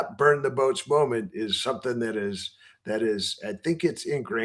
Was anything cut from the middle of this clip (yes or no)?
no